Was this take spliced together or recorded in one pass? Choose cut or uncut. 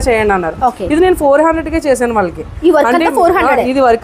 uncut